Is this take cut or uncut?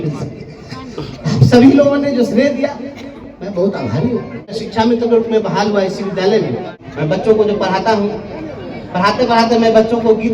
cut